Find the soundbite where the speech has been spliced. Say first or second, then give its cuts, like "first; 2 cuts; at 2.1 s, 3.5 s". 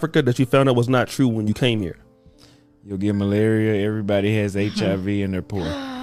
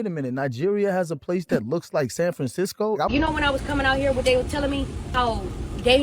second; 1 cut; at 3.1 s